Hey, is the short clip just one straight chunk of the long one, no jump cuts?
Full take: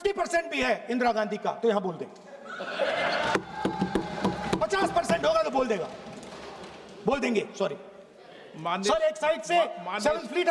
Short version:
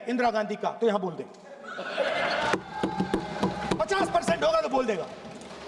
yes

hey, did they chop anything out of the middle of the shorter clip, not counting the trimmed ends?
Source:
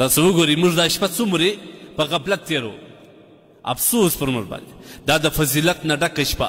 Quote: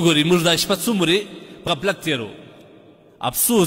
yes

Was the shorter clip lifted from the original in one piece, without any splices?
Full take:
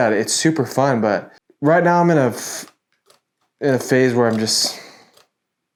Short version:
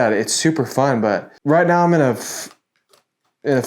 no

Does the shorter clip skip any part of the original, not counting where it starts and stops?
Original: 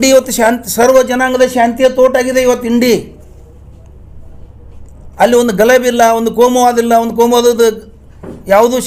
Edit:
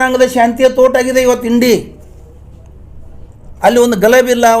yes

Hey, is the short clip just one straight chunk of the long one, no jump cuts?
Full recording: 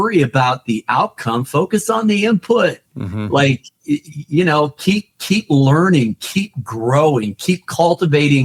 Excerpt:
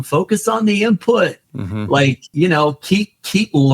no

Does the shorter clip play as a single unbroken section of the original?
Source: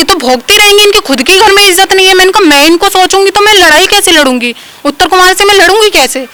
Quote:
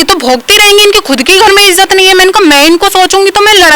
yes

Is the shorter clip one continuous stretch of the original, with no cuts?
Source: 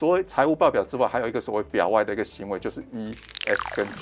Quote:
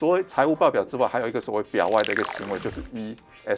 yes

